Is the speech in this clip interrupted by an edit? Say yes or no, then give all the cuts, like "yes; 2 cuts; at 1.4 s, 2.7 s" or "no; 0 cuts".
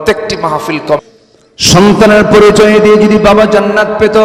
yes; 1 cut; at 1.0 s